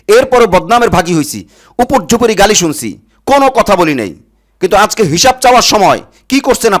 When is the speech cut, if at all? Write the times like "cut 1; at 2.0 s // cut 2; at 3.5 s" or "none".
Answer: none